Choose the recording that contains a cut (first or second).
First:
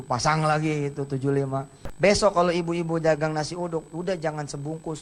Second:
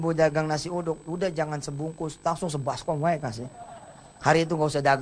first